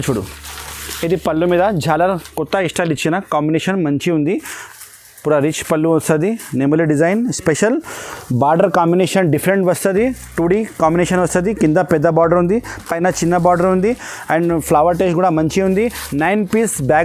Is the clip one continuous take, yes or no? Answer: yes